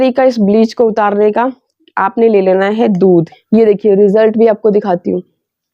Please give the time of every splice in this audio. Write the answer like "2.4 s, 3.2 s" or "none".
3.3 s